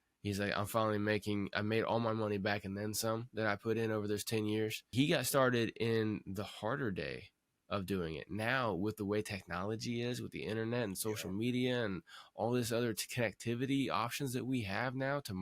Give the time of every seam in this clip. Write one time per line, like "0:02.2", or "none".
0:04.8